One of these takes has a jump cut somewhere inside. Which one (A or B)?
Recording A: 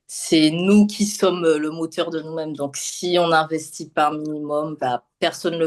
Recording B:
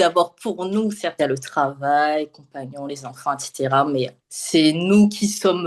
B